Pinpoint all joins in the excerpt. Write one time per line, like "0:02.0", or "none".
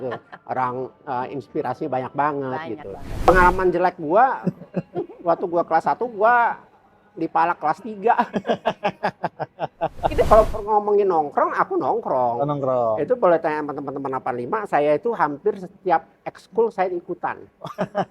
0:03.3
0:10.3